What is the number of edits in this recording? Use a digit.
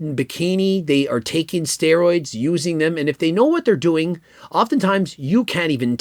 0